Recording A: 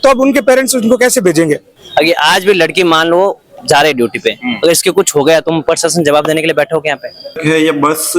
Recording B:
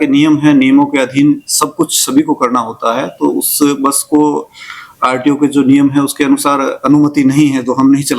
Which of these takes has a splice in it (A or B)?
A